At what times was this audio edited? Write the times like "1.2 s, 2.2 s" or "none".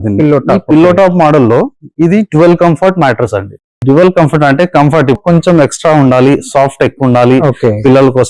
5.2 s